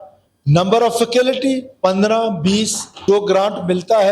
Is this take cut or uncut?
cut